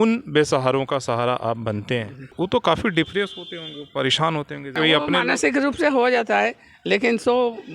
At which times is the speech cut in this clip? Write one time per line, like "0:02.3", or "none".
0:02.2
0:04.7